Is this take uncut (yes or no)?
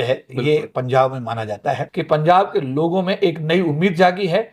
no